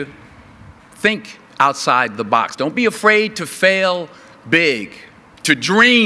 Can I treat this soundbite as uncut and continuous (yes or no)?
yes